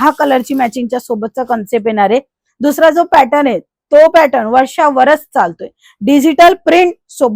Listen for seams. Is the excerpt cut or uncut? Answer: uncut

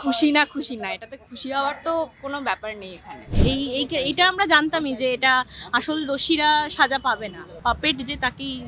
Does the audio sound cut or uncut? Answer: cut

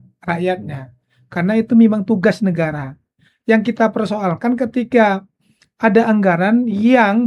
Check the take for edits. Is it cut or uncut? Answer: uncut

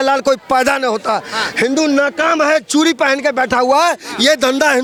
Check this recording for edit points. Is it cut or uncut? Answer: uncut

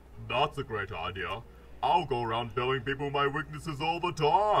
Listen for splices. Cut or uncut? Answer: uncut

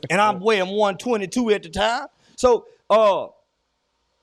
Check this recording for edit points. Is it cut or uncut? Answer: uncut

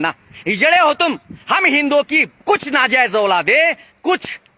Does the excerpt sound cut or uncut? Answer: cut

